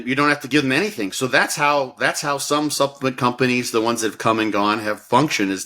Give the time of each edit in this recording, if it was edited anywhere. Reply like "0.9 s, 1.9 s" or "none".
none